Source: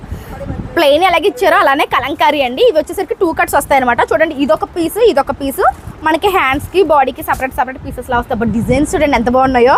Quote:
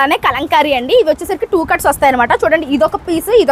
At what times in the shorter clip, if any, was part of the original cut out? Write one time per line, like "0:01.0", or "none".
none